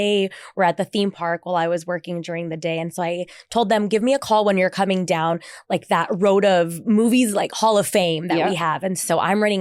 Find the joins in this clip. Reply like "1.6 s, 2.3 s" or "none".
none